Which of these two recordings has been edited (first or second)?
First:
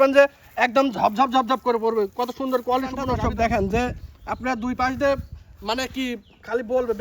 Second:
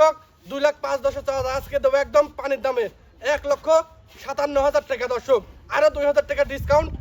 first